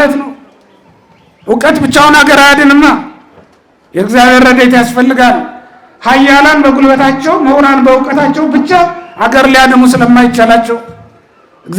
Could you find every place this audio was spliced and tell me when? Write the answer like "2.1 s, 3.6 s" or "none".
none